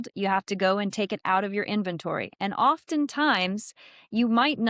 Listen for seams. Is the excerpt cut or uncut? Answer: uncut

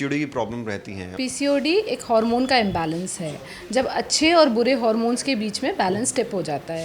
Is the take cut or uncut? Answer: cut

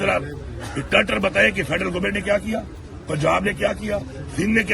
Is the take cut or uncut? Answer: uncut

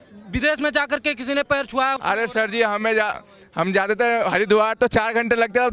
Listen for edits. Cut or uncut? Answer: cut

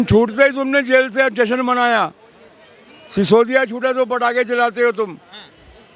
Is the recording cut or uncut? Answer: uncut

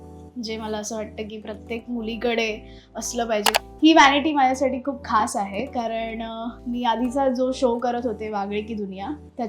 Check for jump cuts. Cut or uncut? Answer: cut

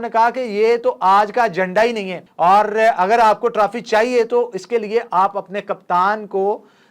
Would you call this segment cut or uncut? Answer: cut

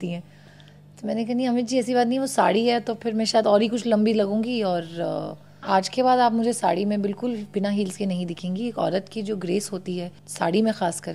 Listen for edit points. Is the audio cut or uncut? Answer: cut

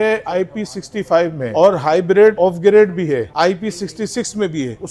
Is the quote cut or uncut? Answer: cut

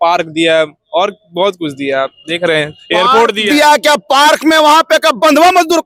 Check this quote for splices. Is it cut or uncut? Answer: uncut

